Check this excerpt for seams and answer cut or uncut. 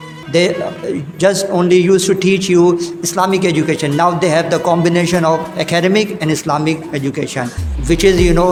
uncut